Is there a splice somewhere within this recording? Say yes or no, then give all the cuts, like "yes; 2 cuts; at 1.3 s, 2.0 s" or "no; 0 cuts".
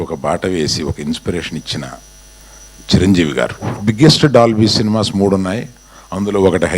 yes; 1 cut; at 3.7 s